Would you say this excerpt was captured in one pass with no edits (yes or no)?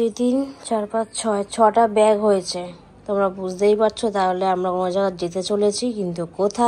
yes